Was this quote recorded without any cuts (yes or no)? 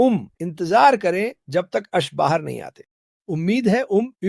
yes